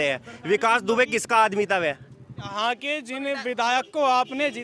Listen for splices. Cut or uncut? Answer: cut